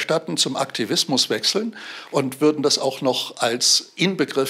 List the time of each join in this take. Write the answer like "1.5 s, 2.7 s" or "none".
none